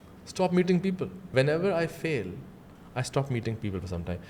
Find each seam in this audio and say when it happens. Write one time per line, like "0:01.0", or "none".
0:01.2